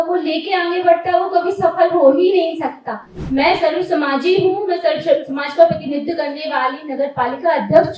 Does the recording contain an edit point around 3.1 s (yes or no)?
yes